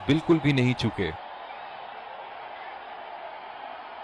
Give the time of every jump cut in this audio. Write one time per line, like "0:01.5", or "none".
none